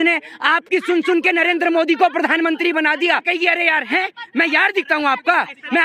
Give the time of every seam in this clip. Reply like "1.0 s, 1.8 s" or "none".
3.3 s